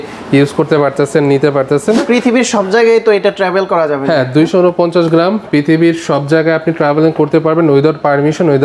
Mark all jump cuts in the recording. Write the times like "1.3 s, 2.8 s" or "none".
2.0 s